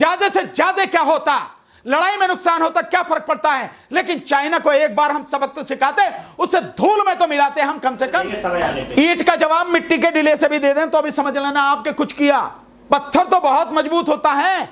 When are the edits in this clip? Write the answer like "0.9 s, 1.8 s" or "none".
8.4 s

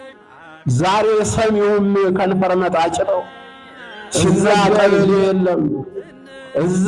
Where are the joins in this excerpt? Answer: 4.9 s

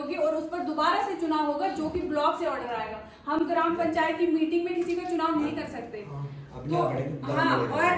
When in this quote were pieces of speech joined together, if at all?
none

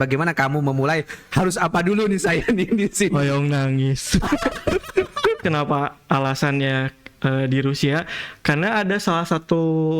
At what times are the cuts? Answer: 5.4 s

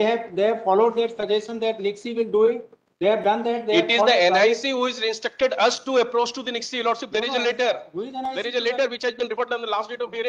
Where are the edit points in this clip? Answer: none

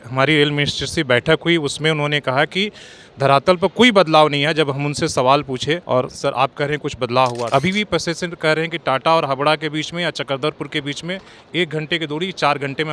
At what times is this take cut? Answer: none

